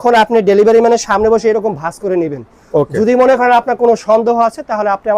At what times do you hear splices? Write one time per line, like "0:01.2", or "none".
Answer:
none